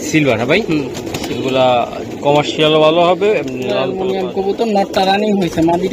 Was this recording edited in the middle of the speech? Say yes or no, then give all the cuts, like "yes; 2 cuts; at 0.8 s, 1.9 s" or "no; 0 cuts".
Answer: yes; 1 cut; at 3.9 s